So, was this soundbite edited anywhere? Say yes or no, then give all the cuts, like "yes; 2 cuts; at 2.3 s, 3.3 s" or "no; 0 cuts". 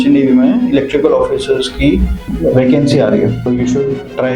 yes; 2 cuts; at 2.2 s, 3.4 s